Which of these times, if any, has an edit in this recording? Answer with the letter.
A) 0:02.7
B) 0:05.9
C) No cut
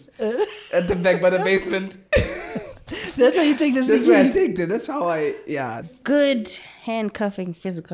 B